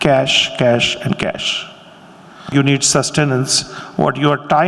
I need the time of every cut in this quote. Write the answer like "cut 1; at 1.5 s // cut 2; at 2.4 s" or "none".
cut 1; at 2.5 s

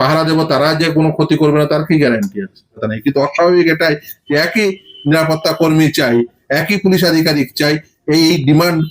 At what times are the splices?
cut 1; at 2.9 s

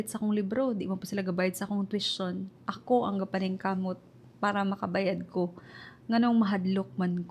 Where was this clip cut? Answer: none

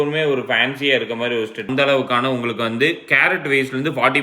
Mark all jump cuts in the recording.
cut 1; at 1.7 s

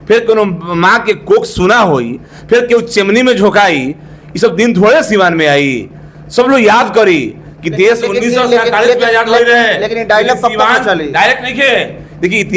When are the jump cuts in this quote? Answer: none

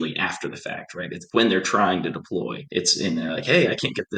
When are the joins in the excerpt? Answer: cut 1; at 1.2 s // cut 2; at 2.6 s

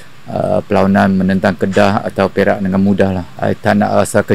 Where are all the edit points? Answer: cut 1; at 3.3 s

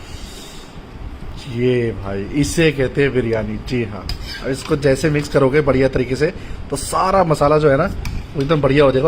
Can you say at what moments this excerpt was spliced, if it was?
cut 1; at 1.3 s

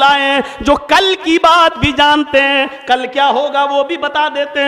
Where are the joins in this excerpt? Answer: none

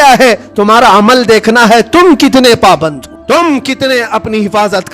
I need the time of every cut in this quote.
cut 1; at 3.1 s

